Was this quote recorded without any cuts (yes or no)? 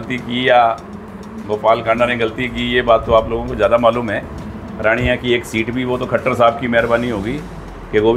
yes